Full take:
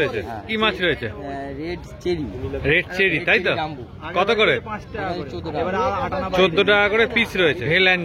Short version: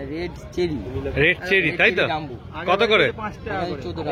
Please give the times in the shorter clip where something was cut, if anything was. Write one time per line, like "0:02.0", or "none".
none